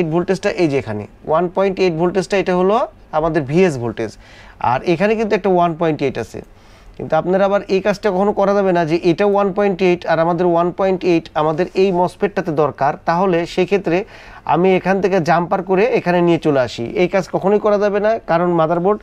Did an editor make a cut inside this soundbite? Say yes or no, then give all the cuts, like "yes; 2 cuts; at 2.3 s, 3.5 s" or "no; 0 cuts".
no; 0 cuts